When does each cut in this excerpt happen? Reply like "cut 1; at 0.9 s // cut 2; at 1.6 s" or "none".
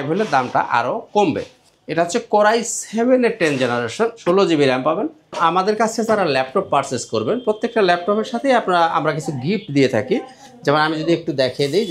cut 1; at 4.2 s // cut 2; at 5.3 s